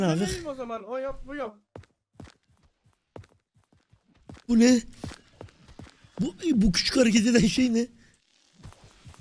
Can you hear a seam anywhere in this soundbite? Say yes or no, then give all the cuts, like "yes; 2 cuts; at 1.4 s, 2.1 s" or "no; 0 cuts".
no; 0 cuts